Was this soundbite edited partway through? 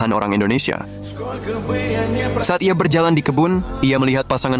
no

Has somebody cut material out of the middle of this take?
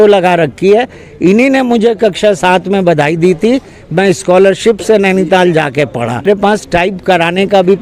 yes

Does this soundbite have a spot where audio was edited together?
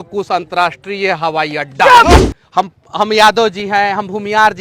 yes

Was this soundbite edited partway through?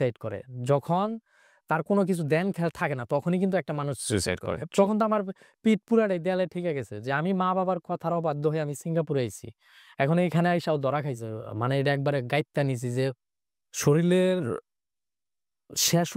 yes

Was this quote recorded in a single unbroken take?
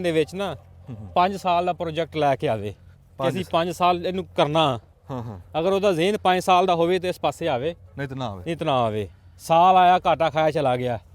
yes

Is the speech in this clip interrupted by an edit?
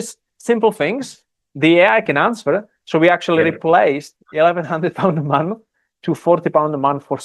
no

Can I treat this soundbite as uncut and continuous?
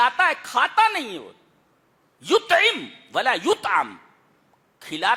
yes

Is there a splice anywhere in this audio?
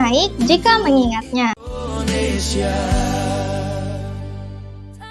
no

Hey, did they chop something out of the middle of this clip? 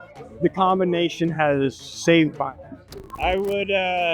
yes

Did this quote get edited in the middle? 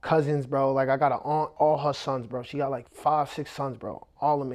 yes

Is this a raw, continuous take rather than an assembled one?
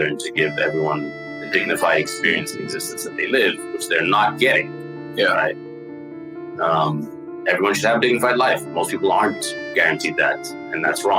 yes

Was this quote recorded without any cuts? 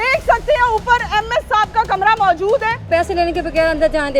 no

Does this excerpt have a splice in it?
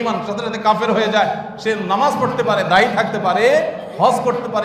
no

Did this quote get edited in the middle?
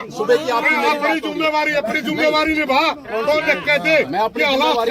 no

